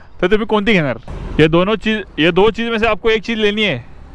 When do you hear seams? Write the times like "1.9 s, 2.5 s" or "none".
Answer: 1.2 s